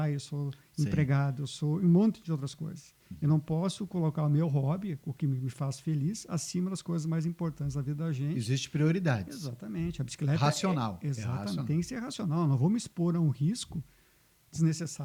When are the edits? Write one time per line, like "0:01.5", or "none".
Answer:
none